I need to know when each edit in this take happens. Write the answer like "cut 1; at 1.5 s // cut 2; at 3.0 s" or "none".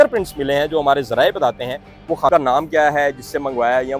cut 1; at 2.3 s